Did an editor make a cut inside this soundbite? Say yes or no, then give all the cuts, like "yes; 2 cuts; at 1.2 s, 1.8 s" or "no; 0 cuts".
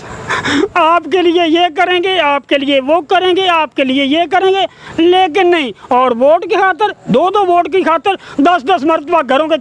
no; 0 cuts